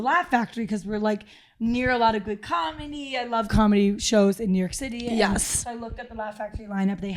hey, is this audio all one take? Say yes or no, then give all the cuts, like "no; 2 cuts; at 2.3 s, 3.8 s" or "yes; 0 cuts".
yes; 0 cuts